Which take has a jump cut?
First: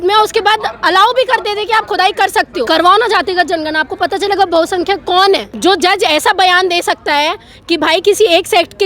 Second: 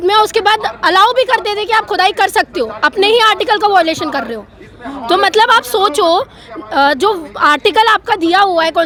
first; 2 cuts; at 2.6 s, 5.5 s

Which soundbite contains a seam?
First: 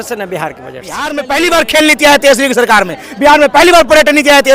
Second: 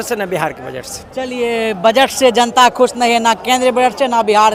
first; 1 cut; at 1.1 s

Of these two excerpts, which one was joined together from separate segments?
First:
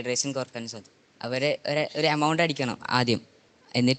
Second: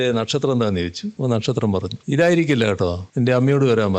second; 3 cuts; at 1.1 s, 1.9 s, 3.0 s

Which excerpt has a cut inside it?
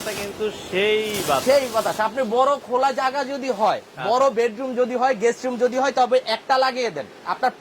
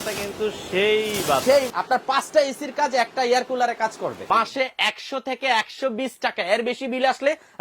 second; 2 cuts; at 1.7 s, 4.2 s

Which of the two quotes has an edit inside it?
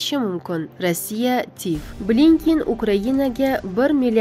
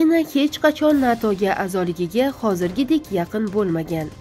first; 1 cut; at 1.9 s

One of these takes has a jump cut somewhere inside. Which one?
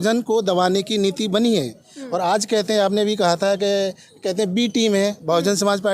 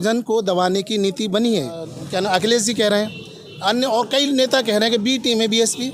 second; 1 cut; at 2.0 s

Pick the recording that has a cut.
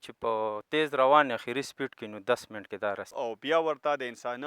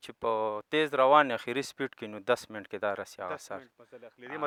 first; 1 cut; at 3.1 s

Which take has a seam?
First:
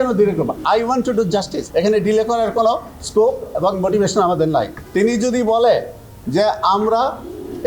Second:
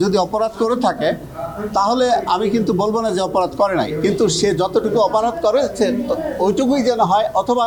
first; 2 cuts; at 1.6 s, 4.8 s

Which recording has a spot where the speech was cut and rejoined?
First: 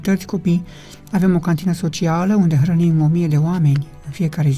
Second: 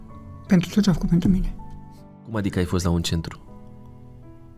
second; 1 cut; at 2.3 s

